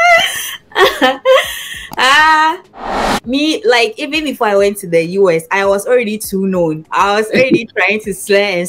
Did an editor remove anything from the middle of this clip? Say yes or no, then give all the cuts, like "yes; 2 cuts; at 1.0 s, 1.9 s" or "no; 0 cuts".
yes; 2 cuts; at 3.0 s, 6.8 s